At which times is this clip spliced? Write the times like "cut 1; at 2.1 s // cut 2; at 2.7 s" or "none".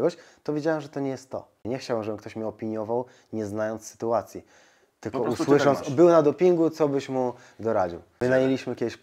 cut 1; at 1.6 s // cut 2; at 8.1 s